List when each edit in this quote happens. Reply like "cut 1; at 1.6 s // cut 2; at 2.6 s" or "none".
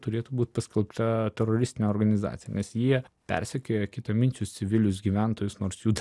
cut 1; at 3.1 s